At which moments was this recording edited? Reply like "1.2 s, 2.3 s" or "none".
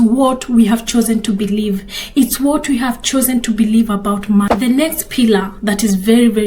4.5 s